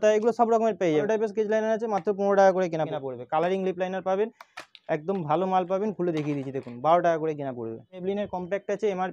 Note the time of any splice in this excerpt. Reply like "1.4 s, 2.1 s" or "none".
1.1 s, 2.9 s, 8.0 s